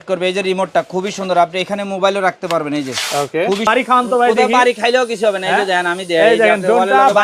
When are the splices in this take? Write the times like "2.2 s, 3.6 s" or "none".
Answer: 3.7 s